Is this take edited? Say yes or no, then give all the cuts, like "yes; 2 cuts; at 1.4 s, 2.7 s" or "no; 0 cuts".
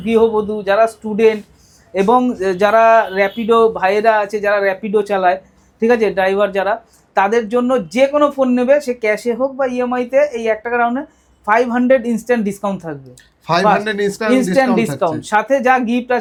no; 0 cuts